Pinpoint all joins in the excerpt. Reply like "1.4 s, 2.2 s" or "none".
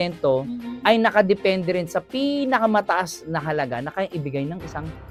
none